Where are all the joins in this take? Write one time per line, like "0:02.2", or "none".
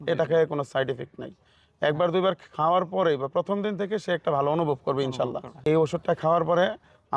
0:05.5